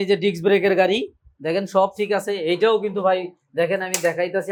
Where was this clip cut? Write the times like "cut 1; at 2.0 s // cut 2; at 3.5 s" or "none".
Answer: none